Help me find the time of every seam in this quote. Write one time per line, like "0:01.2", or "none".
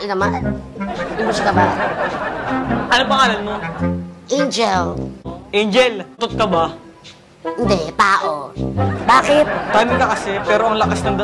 0:05.3
0:06.2